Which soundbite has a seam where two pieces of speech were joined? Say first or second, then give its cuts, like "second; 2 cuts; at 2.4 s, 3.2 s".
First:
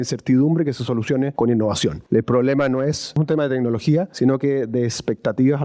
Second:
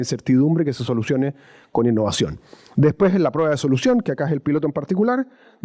first; 4 cuts; at 1.3 s, 2.0 s, 3.2 s, 4.1 s